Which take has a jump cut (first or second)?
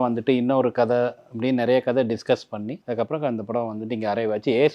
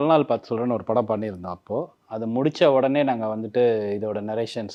first